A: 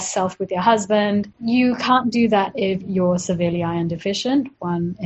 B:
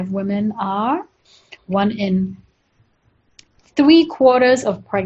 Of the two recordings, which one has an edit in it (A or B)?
A